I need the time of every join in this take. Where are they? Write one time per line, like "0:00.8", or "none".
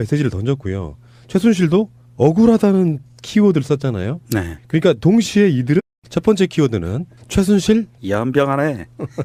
none